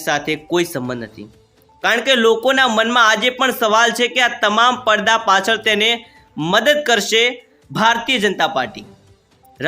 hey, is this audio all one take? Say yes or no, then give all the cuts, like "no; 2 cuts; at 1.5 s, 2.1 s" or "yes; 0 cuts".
yes; 0 cuts